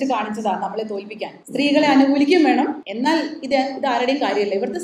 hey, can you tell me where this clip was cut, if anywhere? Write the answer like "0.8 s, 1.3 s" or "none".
1.4 s, 2.8 s